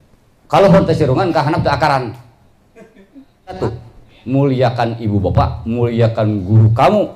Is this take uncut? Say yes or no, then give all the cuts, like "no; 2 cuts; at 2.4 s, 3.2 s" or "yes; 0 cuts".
no; 1 cut; at 3.6 s